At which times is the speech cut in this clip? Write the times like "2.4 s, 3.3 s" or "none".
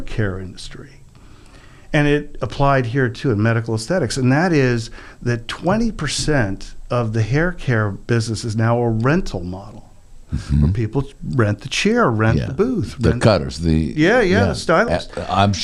none

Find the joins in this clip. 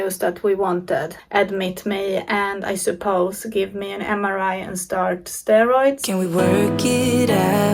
1.2 s, 6.0 s

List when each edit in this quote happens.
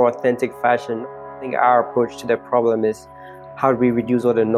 1.2 s

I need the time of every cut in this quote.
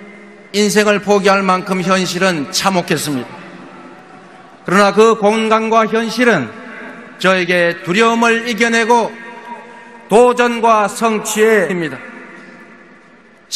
none

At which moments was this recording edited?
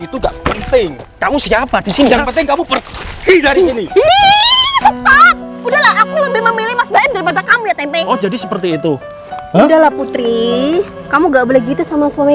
none

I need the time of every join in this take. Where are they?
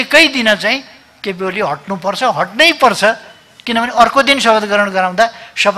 none

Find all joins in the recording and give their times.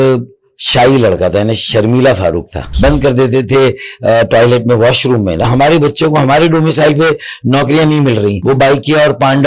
2.6 s, 5.5 s, 8.4 s

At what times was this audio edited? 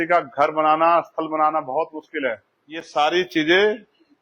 2.9 s

